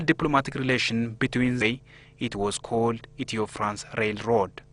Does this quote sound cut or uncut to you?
uncut